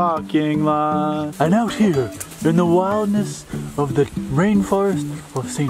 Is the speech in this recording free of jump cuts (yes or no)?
no